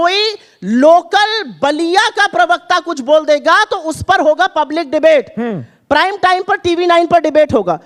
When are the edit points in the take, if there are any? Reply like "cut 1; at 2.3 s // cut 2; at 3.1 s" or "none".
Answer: none